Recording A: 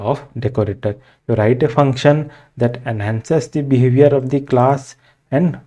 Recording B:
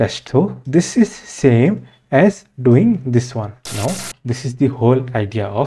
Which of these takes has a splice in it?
B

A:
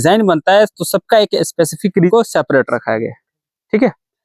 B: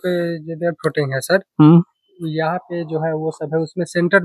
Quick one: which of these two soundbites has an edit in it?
A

